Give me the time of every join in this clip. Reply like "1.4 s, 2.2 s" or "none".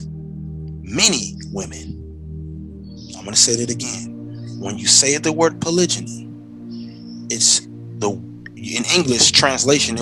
1.4 s, 3.2 s